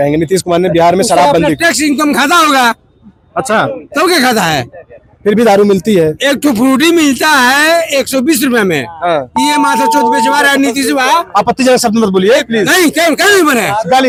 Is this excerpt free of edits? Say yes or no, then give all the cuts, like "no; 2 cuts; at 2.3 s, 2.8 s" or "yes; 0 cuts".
yes; 0 cuts